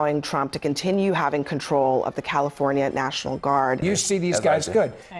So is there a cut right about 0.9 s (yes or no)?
no